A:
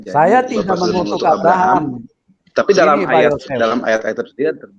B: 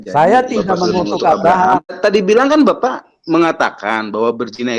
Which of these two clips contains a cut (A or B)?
B